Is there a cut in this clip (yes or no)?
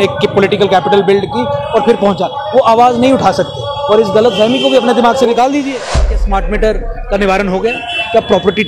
yes